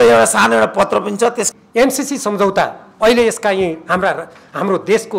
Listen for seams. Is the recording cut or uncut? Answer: cut